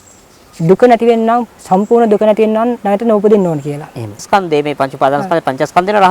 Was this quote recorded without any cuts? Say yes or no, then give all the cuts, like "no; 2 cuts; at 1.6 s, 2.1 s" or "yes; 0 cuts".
no; 1 cut; at 4.3 s